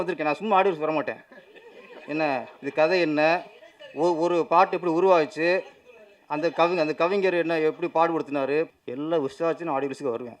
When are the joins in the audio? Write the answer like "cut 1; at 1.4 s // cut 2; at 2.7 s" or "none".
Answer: cut 1; at 8.7 s